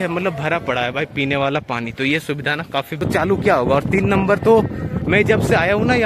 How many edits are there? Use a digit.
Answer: 1